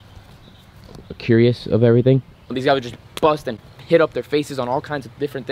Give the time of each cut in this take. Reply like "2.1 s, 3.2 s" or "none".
2.5 s